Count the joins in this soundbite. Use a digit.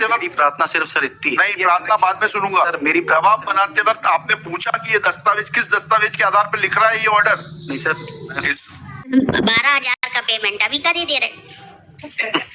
1